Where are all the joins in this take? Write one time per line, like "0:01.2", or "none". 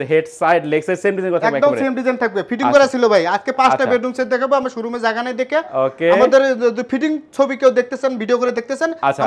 none